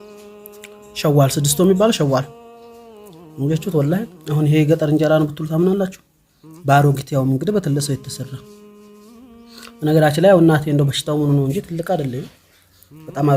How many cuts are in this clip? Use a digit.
1